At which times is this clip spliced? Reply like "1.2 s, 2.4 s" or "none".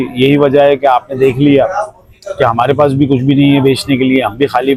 none